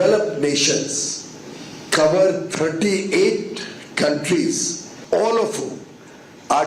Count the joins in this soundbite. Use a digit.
1